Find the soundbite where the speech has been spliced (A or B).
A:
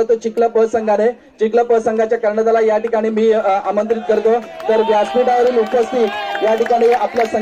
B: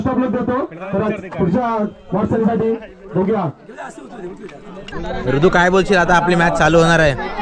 B